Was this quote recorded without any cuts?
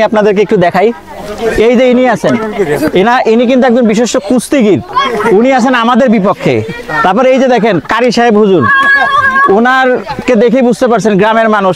yes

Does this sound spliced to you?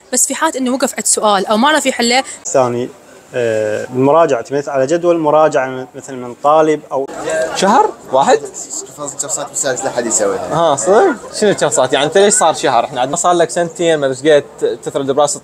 yes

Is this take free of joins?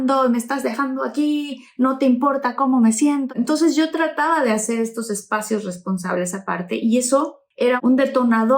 no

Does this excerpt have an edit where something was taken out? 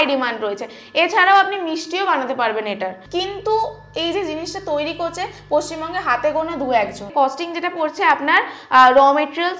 yes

